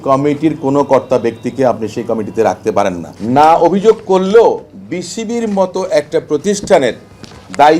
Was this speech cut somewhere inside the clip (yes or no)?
yes